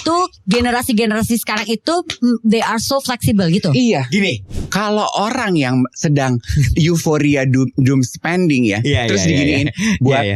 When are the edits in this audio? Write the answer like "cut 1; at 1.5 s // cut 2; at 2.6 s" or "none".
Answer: cut 1; at 4.5 s